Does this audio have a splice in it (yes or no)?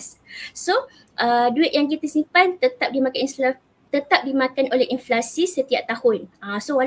no